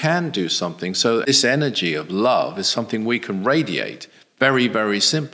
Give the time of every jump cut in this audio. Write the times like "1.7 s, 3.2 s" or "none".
1.2 s